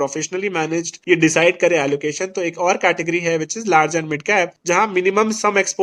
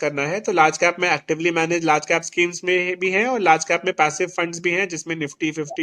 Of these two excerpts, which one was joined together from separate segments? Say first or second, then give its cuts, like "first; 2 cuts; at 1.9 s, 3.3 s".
first; 2 cuts; at 0.9 s, 4.6 s